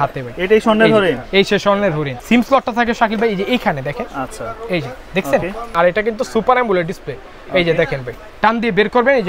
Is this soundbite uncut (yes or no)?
no